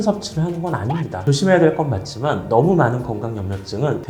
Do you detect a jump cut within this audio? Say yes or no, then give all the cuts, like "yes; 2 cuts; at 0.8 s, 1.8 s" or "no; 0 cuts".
yes; 1 cut; at 1.2 s